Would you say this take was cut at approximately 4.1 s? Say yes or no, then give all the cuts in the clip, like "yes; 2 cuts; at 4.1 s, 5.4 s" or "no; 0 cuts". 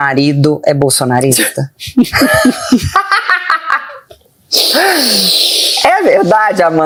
no; 0 cuts